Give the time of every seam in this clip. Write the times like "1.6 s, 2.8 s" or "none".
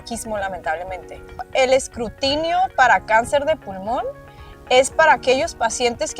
1.5 s